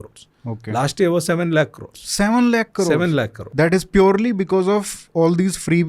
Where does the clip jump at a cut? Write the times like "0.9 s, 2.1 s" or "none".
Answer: 3.4 s